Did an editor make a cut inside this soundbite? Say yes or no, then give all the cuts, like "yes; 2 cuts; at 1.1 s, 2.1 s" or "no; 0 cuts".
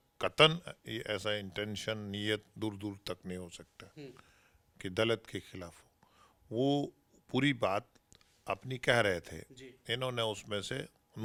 no; 0 cuts